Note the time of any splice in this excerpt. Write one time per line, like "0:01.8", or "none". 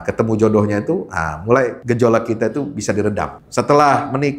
0:01.8
0:03.4